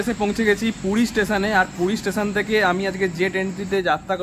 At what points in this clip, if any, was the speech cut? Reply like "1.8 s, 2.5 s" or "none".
none